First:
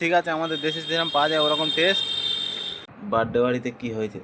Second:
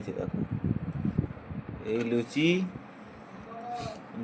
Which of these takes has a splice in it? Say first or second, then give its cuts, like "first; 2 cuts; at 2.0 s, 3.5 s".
first; 1 cut; at 2.9 s